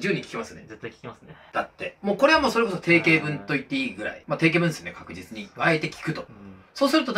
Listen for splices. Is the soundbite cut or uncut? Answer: uncut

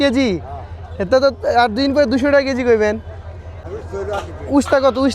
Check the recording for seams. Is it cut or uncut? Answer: cut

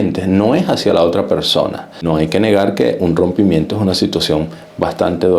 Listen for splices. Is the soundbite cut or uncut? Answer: cut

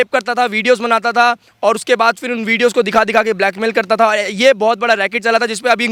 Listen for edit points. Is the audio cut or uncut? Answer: uncut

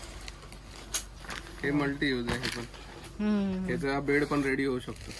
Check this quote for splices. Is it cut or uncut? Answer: uncut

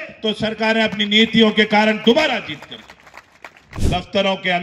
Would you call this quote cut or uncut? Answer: cut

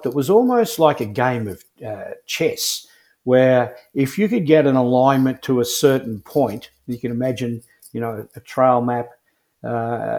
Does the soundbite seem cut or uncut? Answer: uncut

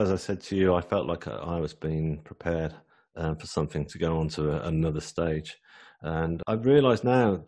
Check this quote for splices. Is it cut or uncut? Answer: cut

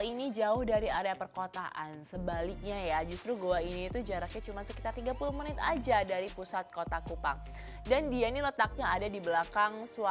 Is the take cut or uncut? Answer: uncut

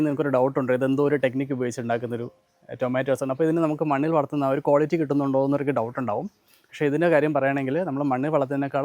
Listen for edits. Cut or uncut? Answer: uncut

